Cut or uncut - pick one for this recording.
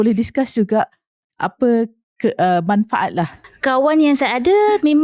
cut